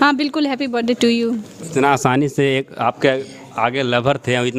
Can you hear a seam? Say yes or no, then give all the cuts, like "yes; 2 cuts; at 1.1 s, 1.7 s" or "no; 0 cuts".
no; 0 cuts